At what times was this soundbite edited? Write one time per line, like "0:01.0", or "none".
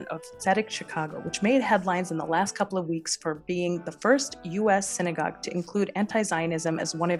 none

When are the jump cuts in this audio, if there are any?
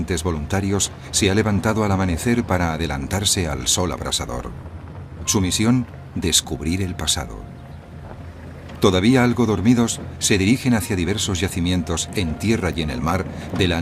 0:07.3

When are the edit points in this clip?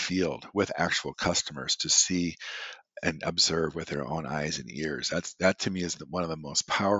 none

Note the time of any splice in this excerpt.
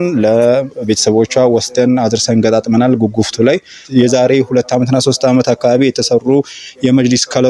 0:03.8

